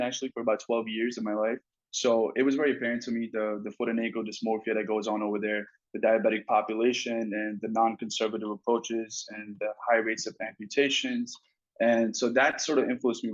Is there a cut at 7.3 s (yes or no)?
no